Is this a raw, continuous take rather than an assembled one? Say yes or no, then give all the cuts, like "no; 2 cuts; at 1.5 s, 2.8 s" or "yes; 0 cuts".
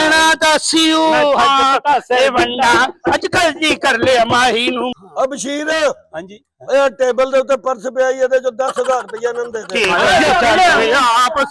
no; 1 cut; at 4.9 s